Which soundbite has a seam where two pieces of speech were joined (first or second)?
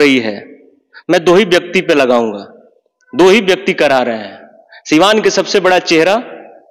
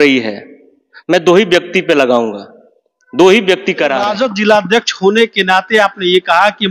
second